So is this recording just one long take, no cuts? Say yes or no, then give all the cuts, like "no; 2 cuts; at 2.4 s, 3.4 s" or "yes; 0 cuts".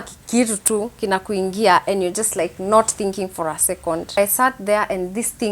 no; 1 cut; at 4.2 s